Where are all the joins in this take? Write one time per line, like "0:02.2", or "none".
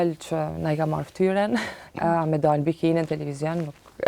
0:01.8